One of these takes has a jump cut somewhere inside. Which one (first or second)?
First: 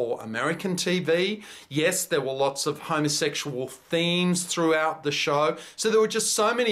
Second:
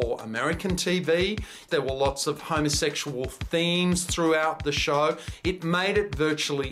second